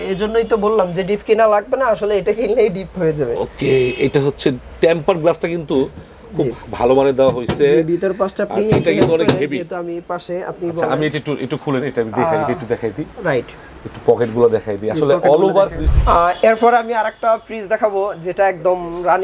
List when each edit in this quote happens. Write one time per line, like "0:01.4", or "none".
0:15.9